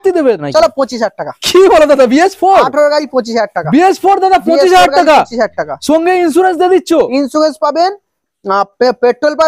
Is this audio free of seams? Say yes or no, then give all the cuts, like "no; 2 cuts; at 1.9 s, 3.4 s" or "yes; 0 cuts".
yes; 0 cuts